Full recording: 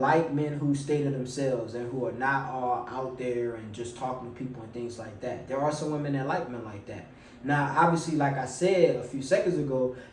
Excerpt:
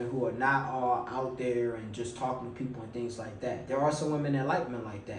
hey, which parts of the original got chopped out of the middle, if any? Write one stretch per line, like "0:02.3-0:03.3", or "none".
none